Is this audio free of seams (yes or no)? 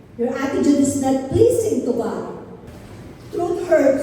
no